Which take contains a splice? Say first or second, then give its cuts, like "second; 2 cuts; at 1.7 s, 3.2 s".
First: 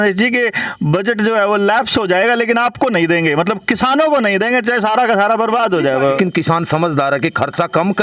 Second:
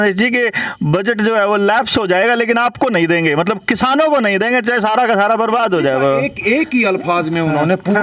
first; 1 cut; at 6.2 s